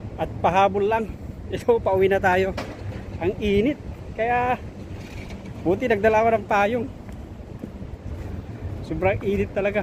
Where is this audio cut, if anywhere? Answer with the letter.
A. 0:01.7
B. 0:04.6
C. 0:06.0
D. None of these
D